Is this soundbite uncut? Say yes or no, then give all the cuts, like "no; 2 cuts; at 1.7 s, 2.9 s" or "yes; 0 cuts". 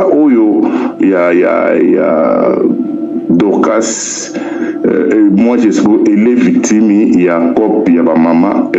yes; 0 cuts